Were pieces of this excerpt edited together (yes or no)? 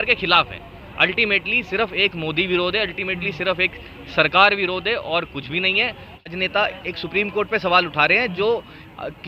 yes